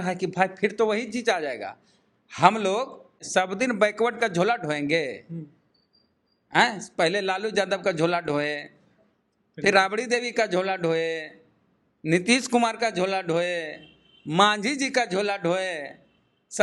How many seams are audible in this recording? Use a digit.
1